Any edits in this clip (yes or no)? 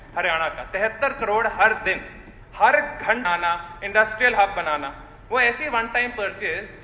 yes